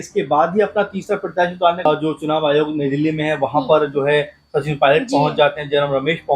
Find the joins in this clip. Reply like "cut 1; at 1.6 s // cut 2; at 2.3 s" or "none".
cut 1; at 1.9 s